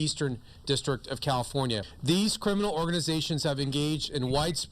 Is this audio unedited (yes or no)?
no